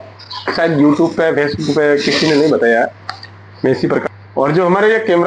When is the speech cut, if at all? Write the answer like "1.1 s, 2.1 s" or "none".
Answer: 4.0 s